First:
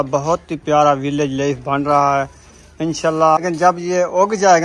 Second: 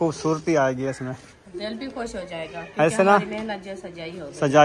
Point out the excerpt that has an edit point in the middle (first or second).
first